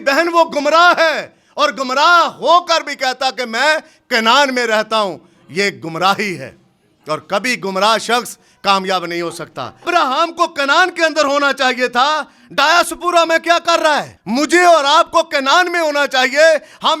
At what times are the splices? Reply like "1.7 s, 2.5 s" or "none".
9.9 s, 14.1 s